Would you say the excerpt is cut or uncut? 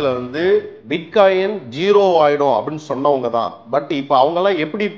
uncut